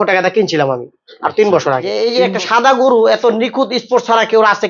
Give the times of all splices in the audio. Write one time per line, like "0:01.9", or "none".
0:01.9